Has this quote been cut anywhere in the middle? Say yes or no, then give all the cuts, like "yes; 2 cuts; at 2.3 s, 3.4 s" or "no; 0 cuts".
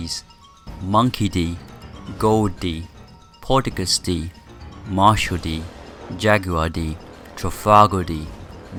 no; 0 cuts